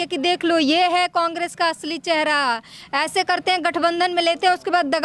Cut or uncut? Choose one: uncut